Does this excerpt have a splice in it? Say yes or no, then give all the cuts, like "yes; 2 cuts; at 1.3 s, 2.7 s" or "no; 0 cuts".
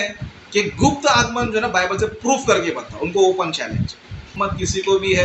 yes; 1 cut; at 4.3 s